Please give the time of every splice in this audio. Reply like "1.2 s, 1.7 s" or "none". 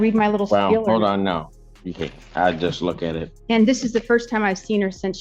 3.3 s

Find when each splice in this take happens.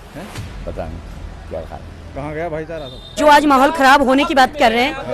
3.1 s

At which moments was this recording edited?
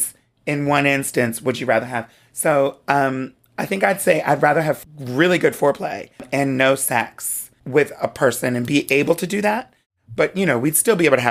4.8 s, 6.3 s, 7.5 s

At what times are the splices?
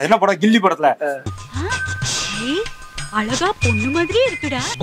none

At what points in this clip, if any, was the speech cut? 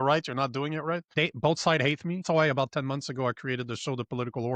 1.1 s, 2.2 s

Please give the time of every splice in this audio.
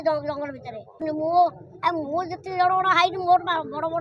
1.0 s

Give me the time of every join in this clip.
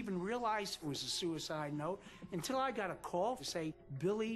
0.9 s, 3.4 s

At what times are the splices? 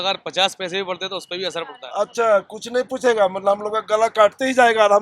1.8 s

